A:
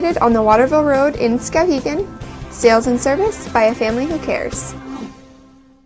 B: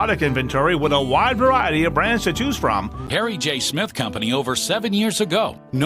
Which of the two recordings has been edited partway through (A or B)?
B